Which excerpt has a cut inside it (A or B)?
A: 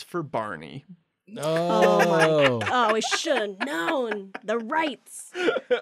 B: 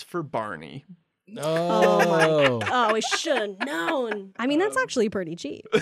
B